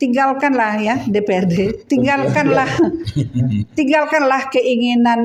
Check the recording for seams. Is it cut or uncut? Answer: uncut